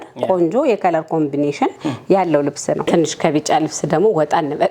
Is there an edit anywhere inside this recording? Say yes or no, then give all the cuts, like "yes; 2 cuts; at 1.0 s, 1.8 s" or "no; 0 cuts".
yes; 1 cut; at 2.8 s